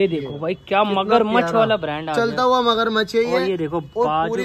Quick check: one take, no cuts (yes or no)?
yes